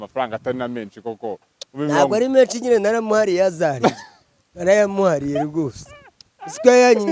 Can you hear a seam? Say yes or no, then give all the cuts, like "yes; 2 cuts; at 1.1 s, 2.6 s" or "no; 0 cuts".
no; 0 cuts